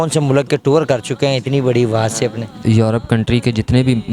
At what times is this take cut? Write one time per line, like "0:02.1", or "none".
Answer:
0:02.5